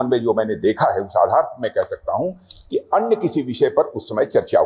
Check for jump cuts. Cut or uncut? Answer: uncut